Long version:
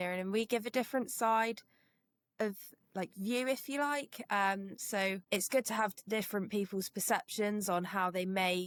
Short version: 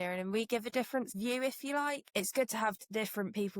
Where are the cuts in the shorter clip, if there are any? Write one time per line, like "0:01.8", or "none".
0:01.1
0:02.1